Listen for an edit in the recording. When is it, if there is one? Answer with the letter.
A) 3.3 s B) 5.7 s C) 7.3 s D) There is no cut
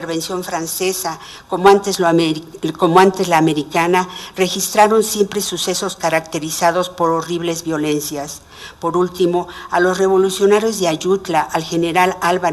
A